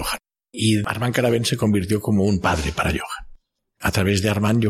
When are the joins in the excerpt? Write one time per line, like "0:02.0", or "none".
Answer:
0:00.9
0:03.8